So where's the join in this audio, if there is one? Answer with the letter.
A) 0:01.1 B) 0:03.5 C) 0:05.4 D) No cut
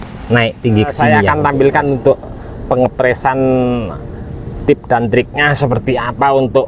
A